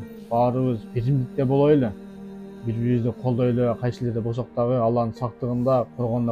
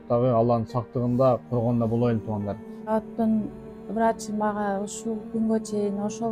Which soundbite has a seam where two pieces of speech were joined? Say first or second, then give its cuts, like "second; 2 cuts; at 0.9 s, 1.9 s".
second; 1 cut; at 2.9 s